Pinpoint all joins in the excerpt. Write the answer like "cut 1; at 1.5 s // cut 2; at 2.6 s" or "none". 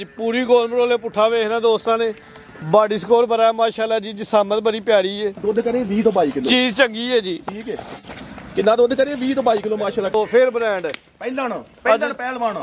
cut 1; at 5.4 s // cut 2; at 10.1 s